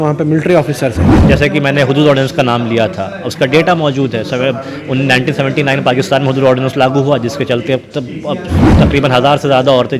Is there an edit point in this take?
yes; 1 cut; at 1.1 s

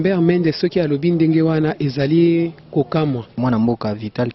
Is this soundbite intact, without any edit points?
no; 1 cut; at 3.3 s

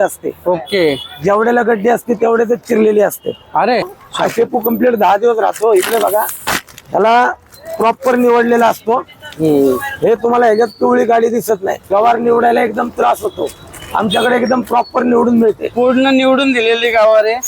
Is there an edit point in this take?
yes; 2 cuts; at 4.0 s, 11.7 s

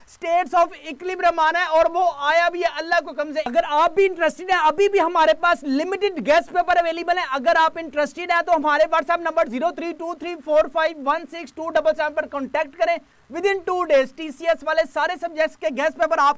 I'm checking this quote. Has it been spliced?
no; 0 cuts

